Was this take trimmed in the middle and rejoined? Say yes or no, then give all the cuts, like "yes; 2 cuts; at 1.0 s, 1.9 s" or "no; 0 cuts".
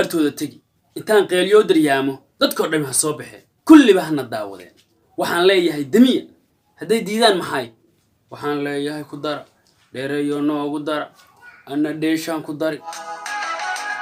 no; 0 cuts